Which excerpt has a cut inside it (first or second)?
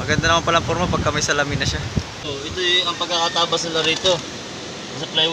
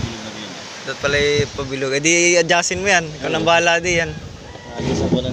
first